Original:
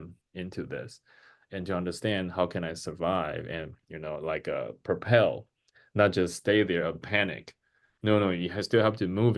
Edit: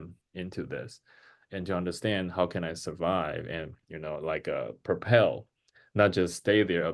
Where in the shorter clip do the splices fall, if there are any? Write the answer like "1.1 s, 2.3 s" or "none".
none